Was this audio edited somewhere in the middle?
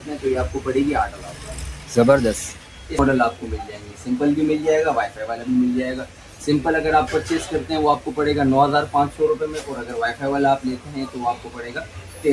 yes; 1 cut; at 3.0 s

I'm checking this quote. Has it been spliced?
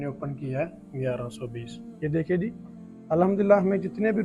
no; 0 cuts

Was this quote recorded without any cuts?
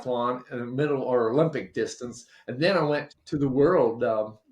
no; 1 cut; at 3.1 s

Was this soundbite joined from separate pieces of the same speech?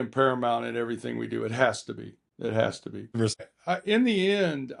yes; 1 cut; at 3.5 s

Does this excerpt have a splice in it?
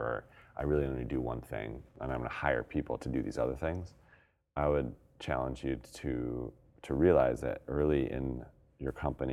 yes; 3 cuts; at 1.9 s, 5.1 s, 6.7 s

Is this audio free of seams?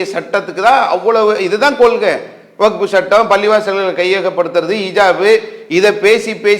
yes; 0 cuts

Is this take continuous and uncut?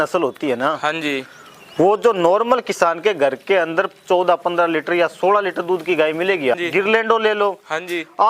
no; 1 cut; at 6.5 s

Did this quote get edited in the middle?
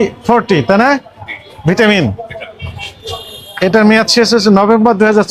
no; 0 cuts

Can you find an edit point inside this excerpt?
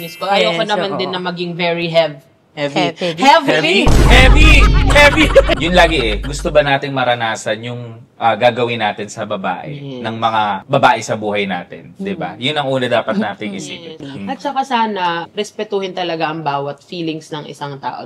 yes; 2 cuts; at 5.6 s, 14.0 s

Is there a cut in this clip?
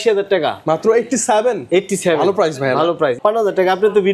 yes; 1 cut; at 3.2 s

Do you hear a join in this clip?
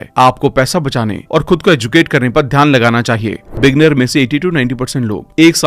yes; 1 cut; at 3.4 s

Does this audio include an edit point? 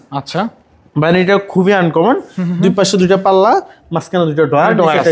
no; 0 cuts

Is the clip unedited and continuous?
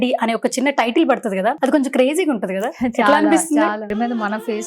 no; 2 cuts; at 1.6 s, 3.9 s

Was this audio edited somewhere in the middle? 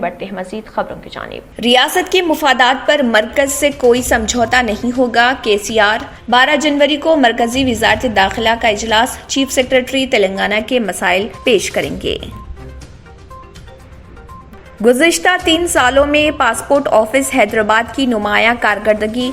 yes; 1 cut; at 1.4 s

